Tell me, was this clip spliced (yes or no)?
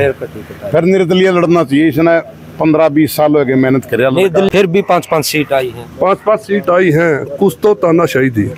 yes